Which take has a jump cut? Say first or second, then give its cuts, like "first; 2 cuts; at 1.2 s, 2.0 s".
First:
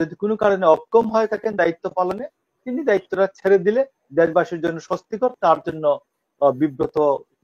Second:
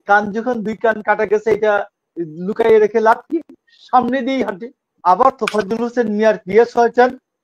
second; 1 cut; at 4.9 s